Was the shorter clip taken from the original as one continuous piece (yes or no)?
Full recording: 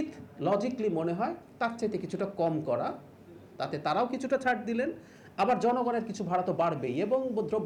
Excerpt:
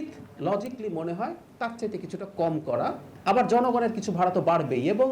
no